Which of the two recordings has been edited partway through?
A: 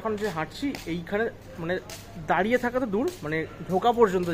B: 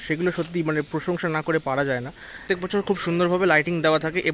B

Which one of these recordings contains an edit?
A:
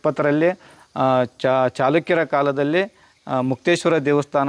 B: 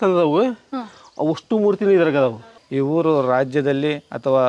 B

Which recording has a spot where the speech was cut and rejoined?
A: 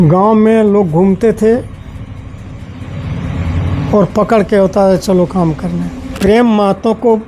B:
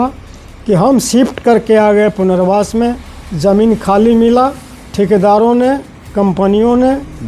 A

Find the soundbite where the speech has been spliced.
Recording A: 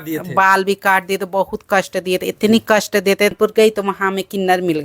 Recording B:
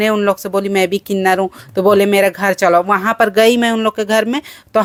A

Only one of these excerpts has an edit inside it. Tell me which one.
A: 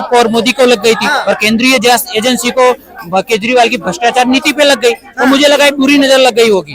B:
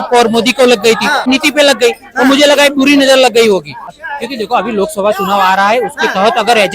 B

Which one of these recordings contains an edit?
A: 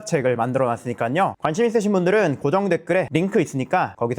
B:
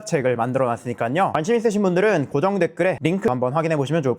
B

